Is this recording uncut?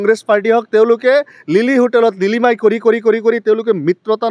yes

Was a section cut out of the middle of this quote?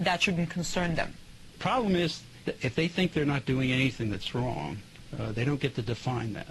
yes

